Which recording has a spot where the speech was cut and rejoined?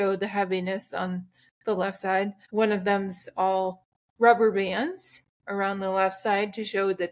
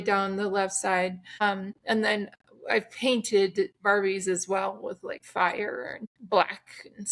second; 2 cuts; at 5.1 s, 6.1 s

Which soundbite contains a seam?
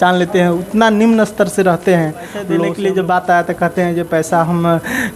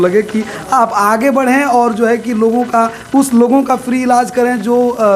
first; 1 cut; at 2.6 s

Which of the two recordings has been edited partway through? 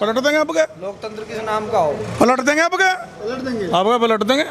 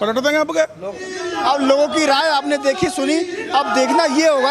second; 1 cut; at 1.0 s

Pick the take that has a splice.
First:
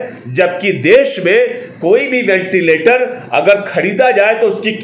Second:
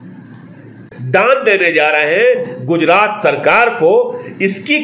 second; 1 cut; at 0.9 s

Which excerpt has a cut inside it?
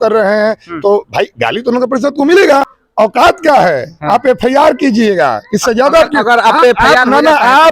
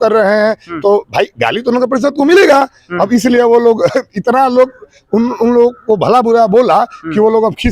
first; 1 cut; at 2.8 s

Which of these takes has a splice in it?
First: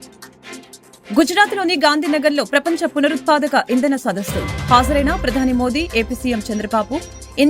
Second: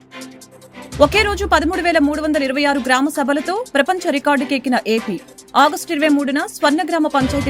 second; 1 cut; at 1.0 s

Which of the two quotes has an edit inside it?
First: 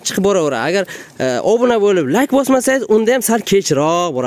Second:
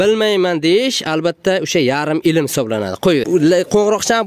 second; 1 cut; at 3.2 s

